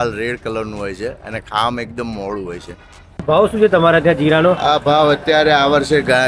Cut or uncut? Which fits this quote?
cut